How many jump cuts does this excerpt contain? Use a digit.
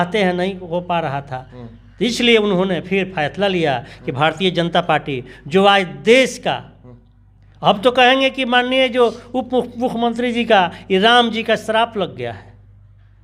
0